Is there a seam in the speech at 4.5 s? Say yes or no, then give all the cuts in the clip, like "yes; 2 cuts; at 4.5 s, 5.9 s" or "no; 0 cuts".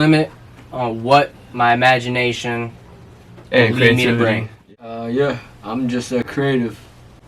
yes; 1 cut; at 4.5 s